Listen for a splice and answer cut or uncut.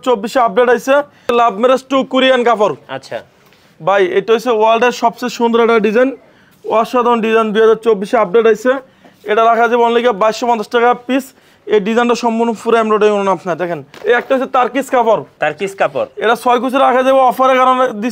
cut